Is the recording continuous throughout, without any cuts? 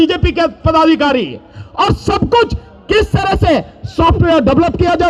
yes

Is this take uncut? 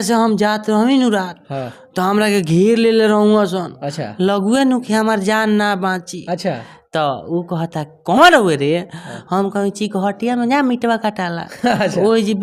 yes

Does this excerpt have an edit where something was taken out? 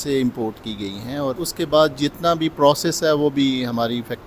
yes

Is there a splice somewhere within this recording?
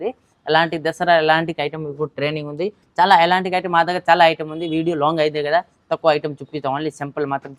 no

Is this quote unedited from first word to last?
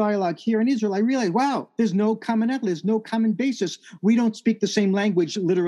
no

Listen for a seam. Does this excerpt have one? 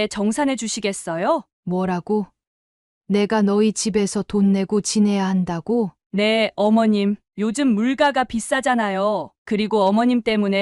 yes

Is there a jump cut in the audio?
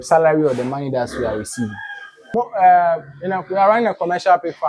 yes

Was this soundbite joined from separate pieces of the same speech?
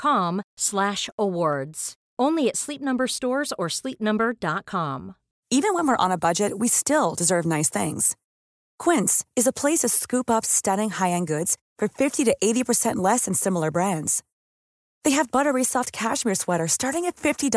no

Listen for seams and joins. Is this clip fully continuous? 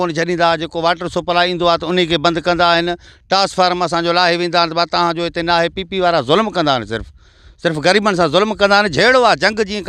yes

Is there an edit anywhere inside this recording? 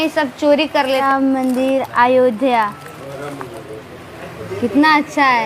yes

